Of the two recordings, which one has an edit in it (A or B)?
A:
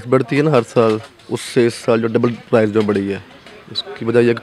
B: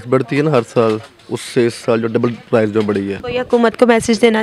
B